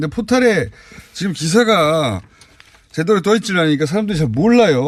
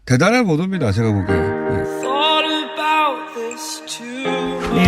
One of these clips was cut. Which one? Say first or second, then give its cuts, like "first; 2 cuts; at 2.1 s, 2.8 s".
second; 1 cut; at 1.2 s